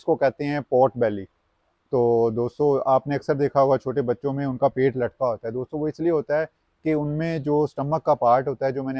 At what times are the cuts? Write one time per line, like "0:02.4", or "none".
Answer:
none